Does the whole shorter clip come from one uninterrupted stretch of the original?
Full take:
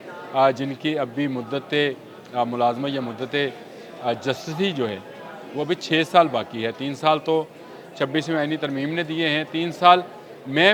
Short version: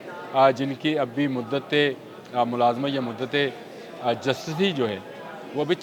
yes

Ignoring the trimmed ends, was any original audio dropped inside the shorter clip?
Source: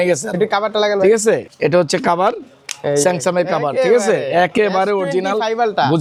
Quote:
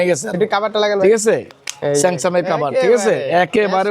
yes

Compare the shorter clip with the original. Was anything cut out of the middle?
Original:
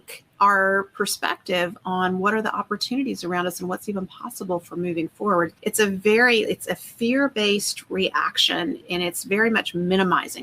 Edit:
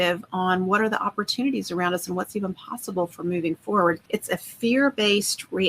yes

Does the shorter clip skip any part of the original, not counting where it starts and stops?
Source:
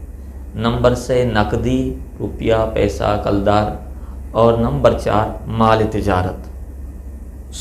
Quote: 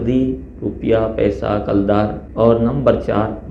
yes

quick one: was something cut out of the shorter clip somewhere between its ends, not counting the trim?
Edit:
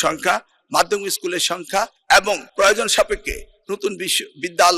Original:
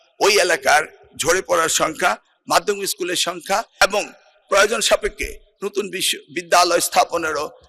yes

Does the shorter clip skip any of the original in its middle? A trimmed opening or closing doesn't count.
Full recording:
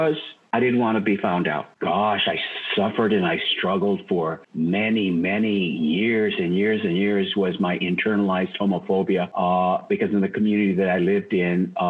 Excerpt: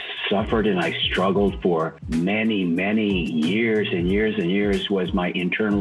no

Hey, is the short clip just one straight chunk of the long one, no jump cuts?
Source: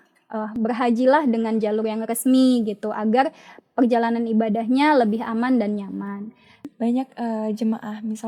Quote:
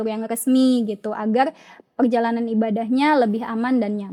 yes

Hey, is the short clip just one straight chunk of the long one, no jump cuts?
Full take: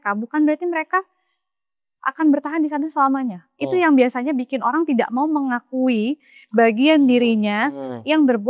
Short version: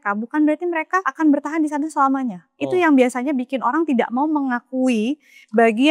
no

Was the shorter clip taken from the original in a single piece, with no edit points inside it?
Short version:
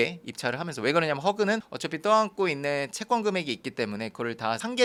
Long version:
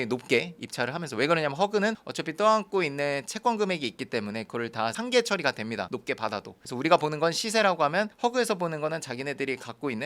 yes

